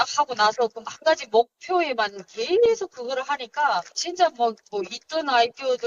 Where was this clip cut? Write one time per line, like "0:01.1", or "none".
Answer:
none